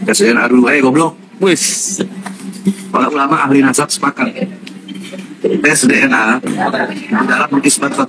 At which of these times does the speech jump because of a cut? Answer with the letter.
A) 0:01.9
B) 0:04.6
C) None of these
C